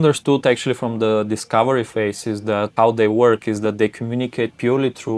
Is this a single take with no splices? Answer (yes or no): no